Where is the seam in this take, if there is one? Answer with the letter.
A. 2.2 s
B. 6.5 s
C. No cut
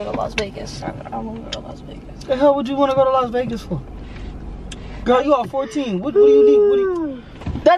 C